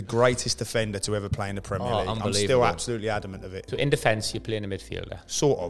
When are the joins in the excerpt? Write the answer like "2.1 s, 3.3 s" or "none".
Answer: 3.6 s